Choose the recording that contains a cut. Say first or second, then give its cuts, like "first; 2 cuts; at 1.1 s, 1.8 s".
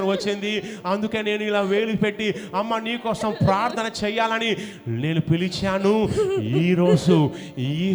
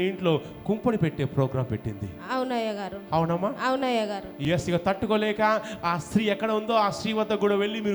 second; 1 cut; at 4.3 s